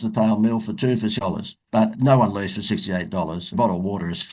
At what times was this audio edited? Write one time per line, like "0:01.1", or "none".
0:01.7